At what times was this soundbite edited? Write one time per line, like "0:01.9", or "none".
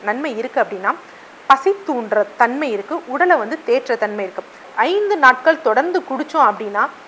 0:04.7

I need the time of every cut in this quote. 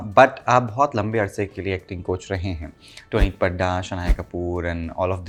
none

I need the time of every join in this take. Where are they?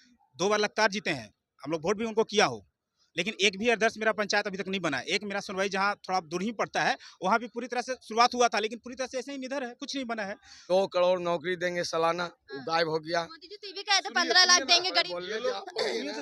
0:10.6

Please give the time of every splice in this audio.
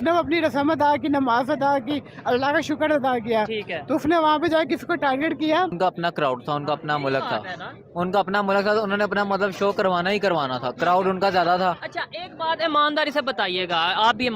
0:05.7

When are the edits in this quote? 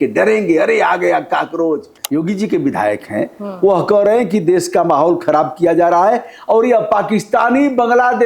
0:01.9

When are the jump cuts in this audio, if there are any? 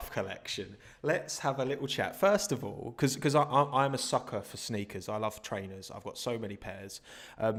none

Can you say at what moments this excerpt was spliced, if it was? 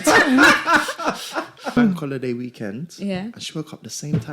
0:01.8

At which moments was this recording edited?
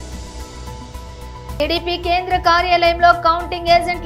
0:01.0

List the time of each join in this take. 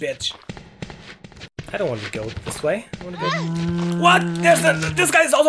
0:01.5

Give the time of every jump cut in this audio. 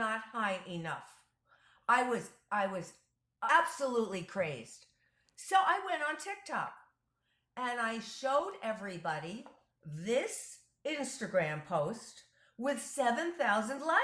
0:03.3

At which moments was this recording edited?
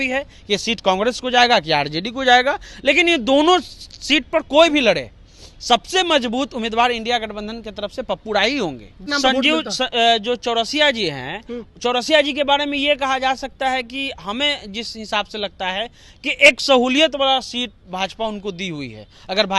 0:09.0

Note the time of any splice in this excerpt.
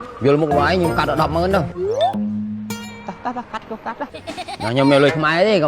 0:04.1

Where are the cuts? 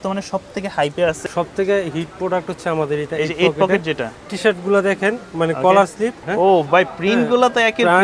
0:01.3
0:04.3
0:06.2

